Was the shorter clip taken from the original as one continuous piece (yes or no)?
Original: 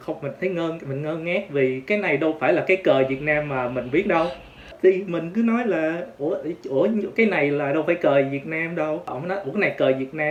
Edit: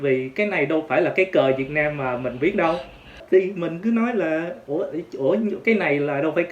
yes